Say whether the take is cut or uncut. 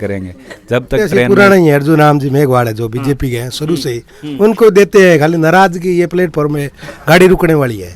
cut